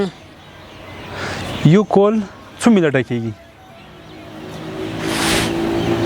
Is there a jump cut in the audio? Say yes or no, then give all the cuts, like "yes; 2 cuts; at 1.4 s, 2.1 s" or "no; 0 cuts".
yes; 1 cut; at 3.9 s